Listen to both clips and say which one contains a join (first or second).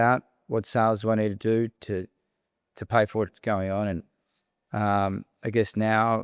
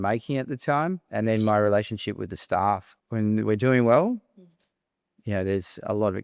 second